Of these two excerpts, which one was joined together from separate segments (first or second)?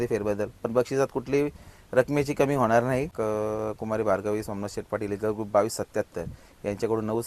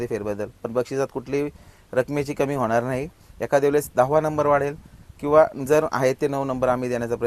first